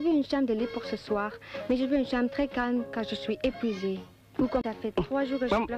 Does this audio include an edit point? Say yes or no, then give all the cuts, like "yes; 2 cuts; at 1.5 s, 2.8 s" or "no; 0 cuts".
no; 0 cuts